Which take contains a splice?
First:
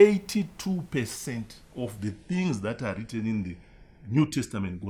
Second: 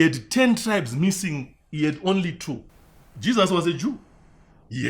second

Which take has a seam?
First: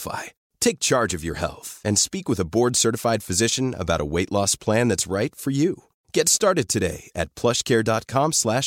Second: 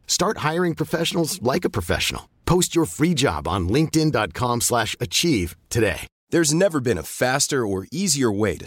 second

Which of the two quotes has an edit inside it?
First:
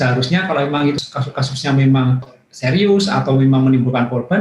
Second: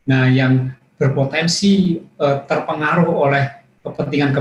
first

